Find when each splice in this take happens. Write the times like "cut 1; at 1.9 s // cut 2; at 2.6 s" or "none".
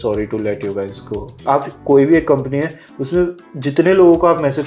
cut 1; at 1.4 s